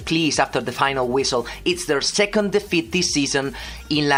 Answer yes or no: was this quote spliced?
no